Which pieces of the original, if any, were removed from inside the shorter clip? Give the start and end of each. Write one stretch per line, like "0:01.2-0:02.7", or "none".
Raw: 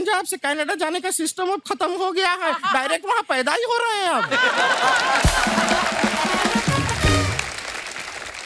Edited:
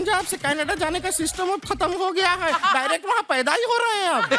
none